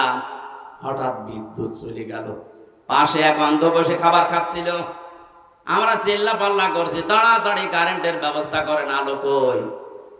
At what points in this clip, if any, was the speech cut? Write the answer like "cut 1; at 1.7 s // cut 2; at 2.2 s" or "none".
none